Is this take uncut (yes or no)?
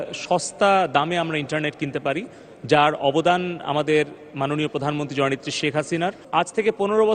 no